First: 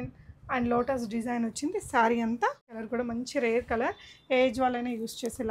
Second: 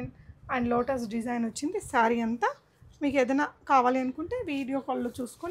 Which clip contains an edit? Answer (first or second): first